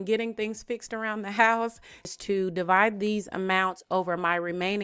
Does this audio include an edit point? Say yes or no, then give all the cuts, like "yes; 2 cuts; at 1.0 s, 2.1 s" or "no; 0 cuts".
yes; 1 cut; at 2.1 s